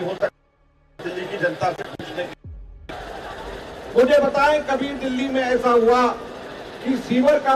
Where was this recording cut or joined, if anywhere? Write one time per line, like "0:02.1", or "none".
0:03.6